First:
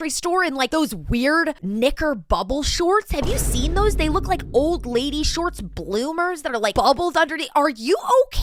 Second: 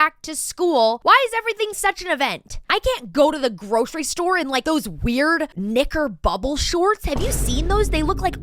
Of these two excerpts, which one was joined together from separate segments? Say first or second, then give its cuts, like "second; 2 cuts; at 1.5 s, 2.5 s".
second; 2 cuts; at 1.0 s, 2.5 s